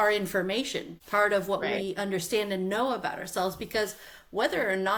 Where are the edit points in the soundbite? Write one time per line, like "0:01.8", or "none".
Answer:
none